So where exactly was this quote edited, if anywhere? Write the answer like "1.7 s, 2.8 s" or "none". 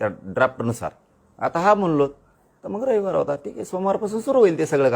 none